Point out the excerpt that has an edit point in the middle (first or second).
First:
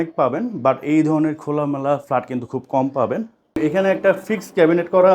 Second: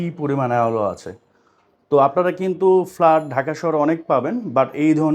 first